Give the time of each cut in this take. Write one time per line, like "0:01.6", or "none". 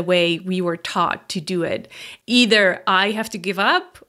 0:02.1